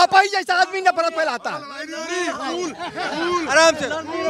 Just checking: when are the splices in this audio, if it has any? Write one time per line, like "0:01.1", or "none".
none

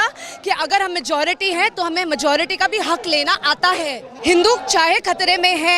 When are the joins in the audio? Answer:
0:04.1

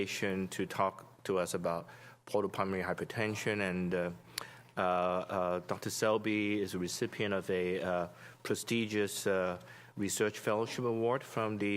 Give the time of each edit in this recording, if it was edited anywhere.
0:04.9

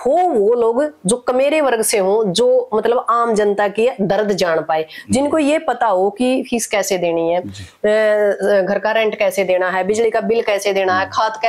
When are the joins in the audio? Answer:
none

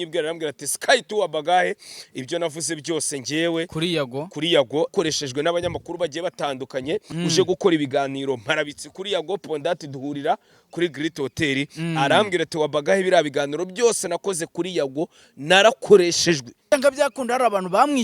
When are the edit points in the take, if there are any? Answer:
0:04.9
0:07.1
0:16.5

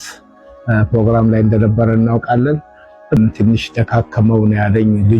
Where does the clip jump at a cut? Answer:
0:03.2

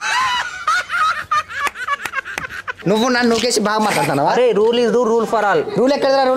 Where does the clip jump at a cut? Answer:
0:02.7

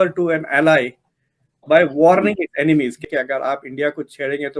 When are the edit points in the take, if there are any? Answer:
0:03.0

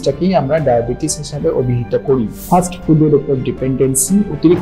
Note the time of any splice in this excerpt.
0:02.4

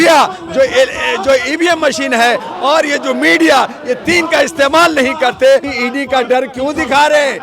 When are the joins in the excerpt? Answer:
0:05.7

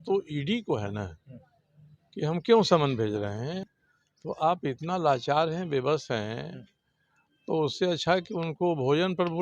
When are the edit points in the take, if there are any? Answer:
0:03.6

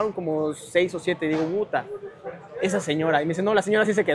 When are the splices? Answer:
none

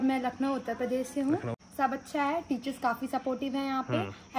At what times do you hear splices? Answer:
0:01.5

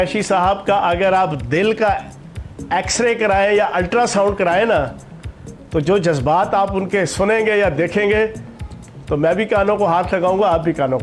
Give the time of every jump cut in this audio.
none

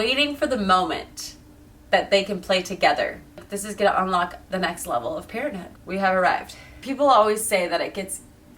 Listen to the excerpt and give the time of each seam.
0:03.5
0:05.7
0:06.7

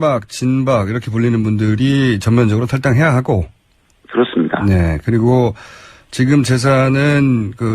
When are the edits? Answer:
0:04.9

